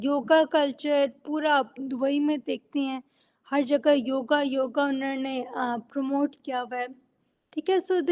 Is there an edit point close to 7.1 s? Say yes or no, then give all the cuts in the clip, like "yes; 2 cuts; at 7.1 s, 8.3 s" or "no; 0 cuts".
no; 0 cuts